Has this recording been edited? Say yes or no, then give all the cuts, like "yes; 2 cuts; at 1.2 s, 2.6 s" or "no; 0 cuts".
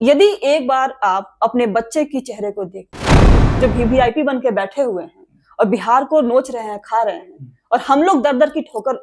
yes; 1 cut; at 3.2 s